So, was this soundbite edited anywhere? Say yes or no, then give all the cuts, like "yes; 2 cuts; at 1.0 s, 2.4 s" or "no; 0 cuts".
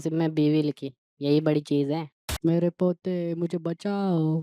yes; 1 cut; at 2.2 s